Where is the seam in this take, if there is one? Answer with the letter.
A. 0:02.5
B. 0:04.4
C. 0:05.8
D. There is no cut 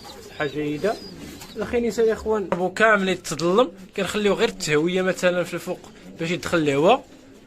A